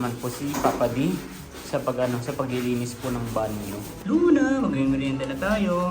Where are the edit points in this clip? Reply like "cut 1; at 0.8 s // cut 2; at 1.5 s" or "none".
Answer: cut 1; at 3.9 s